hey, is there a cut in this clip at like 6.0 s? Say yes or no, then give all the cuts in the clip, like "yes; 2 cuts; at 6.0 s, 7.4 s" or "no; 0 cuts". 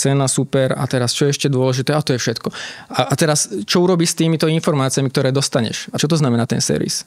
yes; 1 cut; at 6.0 s